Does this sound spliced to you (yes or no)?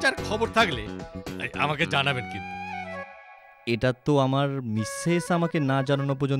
no